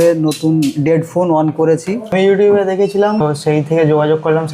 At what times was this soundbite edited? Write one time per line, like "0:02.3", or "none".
0:02.1
0:03.2